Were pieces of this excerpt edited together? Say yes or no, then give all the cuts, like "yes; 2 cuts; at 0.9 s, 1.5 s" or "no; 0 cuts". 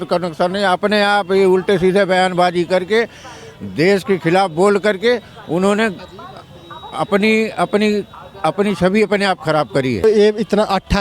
yes; 1 cut; at 10.0 s